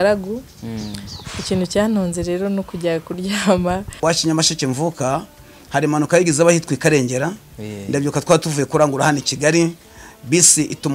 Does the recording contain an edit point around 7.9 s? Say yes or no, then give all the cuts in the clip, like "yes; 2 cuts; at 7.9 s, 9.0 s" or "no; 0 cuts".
no; 1 cut; at 4.0 s